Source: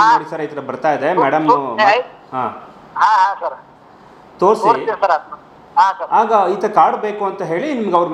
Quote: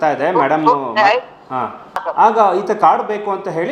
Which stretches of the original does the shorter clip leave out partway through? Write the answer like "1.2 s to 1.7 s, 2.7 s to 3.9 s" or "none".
2.9 s to 6.0 s